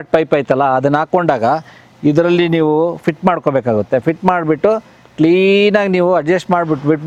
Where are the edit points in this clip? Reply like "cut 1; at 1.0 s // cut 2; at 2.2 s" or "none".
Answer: none